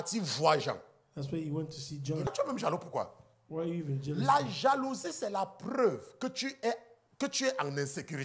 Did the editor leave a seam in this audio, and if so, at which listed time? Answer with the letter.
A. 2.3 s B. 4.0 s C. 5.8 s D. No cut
A